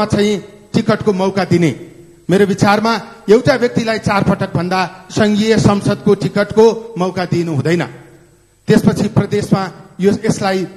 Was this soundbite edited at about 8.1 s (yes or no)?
no